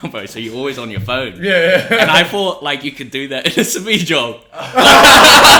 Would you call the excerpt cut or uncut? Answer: uncut